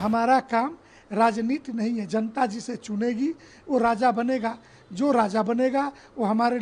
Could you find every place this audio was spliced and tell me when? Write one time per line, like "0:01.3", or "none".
none